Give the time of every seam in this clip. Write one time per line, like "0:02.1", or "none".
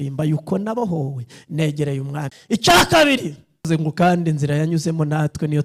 0:03.7